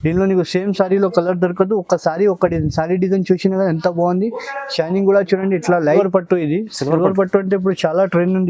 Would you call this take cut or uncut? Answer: cut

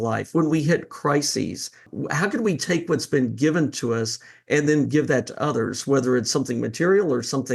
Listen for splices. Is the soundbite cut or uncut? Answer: cut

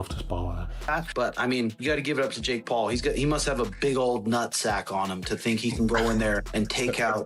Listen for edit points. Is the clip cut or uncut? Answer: cut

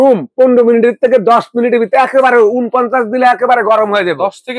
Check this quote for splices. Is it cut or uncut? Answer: uncut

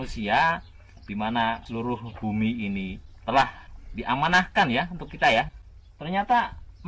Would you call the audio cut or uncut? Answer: cut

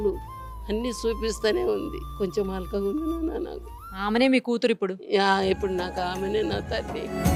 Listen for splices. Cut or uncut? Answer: uncut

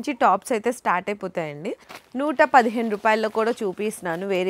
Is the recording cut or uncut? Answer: cut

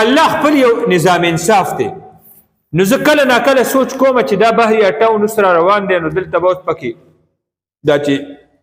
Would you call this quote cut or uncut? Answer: uncut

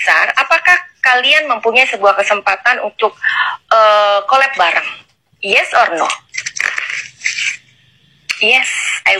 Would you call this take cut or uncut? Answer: uncut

